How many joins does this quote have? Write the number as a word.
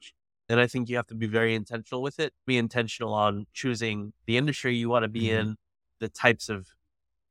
one